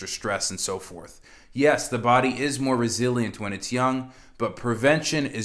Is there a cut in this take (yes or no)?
no